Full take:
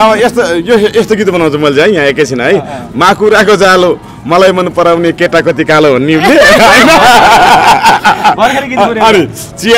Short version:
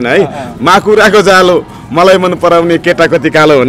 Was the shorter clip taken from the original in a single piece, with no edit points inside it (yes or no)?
yes